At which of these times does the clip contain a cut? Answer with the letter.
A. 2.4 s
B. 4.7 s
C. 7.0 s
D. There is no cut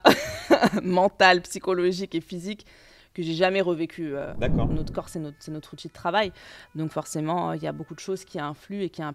B